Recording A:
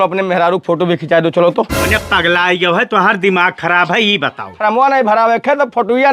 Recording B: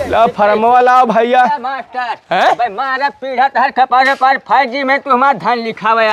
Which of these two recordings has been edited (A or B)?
A